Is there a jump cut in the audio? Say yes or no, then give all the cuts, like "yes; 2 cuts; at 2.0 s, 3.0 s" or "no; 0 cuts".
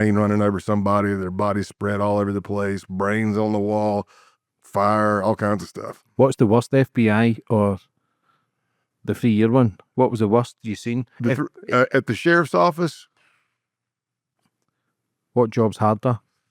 no; 0 cuts